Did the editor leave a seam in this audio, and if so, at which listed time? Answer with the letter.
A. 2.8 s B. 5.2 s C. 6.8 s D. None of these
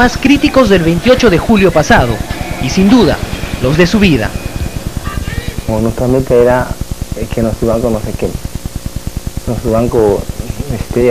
D